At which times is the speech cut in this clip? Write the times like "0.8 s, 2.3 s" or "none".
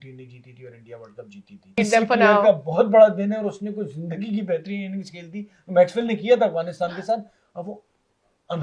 1.7 s